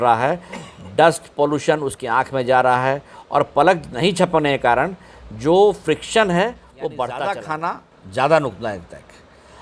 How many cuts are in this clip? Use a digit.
1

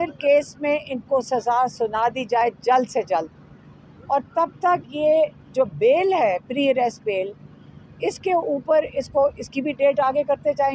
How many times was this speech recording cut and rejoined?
0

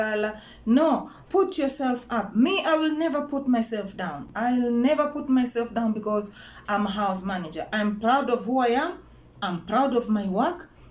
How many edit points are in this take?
0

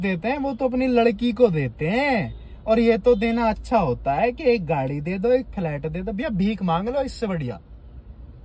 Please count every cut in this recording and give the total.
0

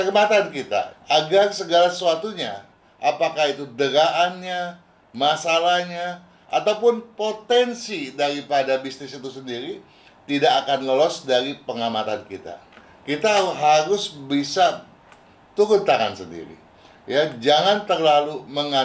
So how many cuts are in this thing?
2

